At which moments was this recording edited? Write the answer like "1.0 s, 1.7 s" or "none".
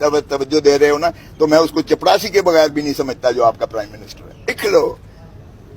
4.6 s